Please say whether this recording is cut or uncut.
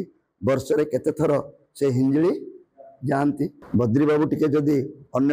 cut